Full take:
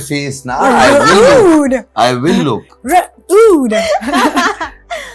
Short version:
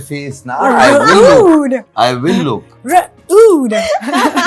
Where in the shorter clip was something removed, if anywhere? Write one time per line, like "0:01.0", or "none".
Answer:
none